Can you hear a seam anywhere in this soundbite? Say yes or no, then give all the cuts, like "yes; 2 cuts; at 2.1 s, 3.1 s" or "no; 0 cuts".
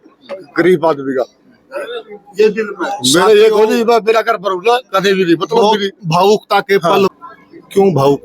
yes; 1 cut; at 7.1 s